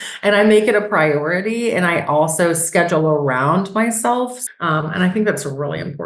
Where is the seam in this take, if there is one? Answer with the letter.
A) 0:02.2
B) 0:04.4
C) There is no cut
B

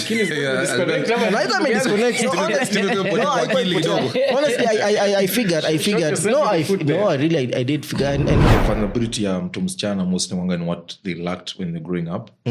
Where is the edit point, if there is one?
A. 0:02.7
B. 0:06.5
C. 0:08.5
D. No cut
C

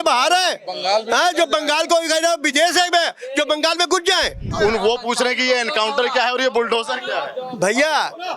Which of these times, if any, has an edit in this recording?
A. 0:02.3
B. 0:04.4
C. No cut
B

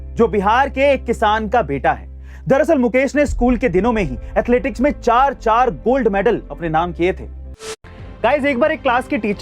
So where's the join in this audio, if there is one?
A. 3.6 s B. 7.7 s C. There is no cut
B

